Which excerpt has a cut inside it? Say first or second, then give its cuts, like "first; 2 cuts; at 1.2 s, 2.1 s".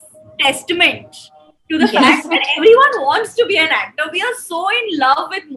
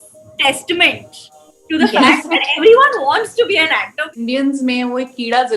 second; 1 cut; at 4.1 s